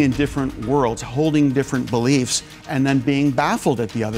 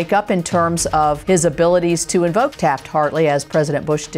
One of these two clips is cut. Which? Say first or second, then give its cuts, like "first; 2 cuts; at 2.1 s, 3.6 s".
second; 2 cuts; at 1.2 s, 2.5 s